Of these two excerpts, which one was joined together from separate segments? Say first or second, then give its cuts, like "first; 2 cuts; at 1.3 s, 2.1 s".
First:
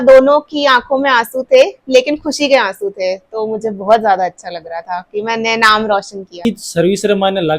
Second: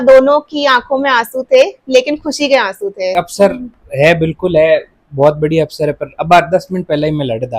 second; 1 cut; at 3.1 s